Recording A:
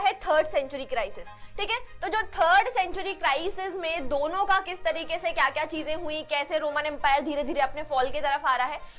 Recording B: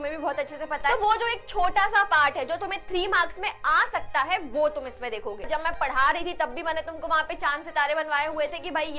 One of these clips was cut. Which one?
B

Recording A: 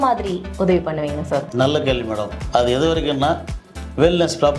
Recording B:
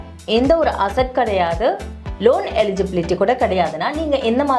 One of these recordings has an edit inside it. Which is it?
A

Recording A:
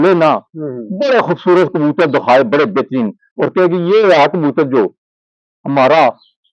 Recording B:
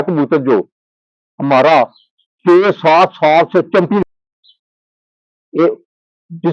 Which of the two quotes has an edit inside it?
B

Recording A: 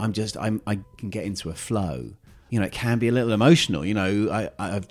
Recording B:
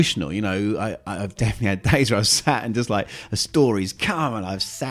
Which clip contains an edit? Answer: A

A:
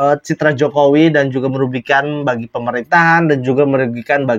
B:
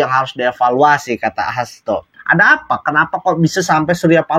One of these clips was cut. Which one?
B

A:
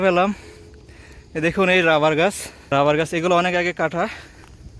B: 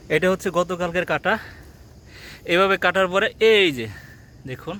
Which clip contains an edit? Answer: A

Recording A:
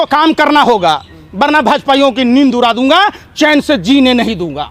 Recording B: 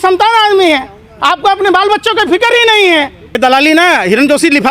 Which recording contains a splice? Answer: B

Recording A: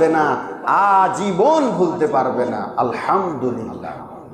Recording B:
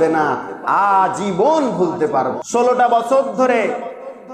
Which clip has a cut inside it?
B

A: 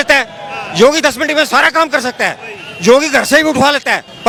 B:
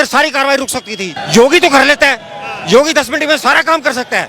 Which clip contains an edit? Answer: B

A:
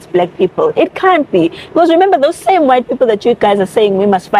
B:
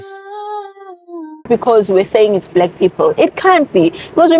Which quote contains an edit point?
B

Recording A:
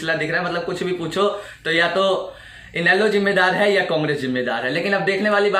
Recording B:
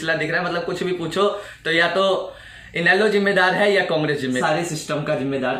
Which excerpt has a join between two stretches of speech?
B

